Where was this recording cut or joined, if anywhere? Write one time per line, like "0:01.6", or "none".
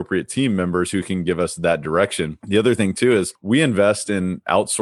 0:02.3
0:03.4